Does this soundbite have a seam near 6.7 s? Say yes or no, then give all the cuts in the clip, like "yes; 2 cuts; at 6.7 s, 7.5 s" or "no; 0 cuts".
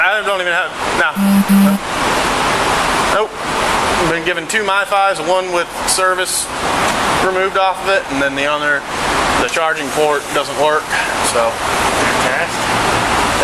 no; 0 cuts